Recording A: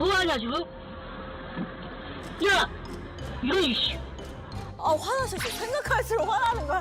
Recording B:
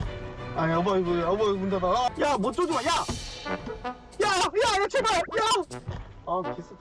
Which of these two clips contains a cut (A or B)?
B